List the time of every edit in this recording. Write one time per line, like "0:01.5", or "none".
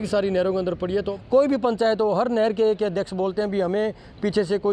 0:01.1